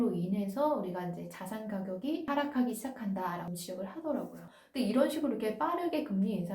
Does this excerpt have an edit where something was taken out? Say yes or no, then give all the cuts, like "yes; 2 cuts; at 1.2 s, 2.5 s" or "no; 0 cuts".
yes; 1 cut; at 4.5 s